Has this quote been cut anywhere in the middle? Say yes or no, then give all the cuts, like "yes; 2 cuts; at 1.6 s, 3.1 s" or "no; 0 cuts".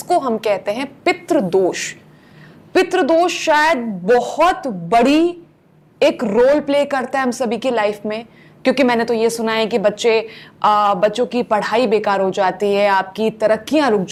no; 0 cuts